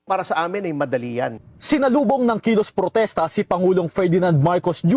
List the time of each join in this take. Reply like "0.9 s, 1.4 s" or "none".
1.4 s